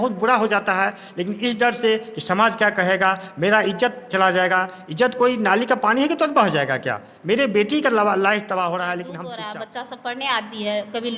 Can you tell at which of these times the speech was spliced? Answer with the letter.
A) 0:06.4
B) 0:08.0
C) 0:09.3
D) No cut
C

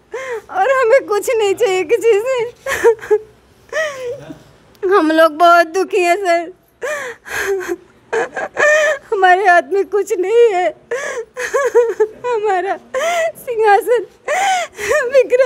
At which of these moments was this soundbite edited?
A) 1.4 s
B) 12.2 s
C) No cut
C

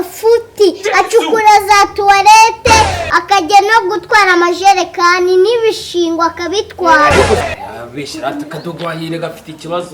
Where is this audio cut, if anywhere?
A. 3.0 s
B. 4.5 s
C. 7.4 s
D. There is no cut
C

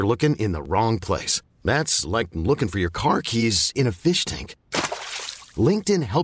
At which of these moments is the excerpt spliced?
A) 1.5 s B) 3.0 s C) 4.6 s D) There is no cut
D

